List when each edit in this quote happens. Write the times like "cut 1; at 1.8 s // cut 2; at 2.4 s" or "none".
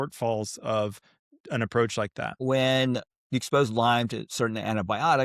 cut 1; at 2.4 s